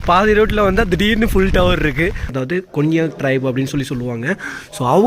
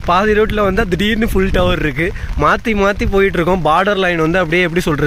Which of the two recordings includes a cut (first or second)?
first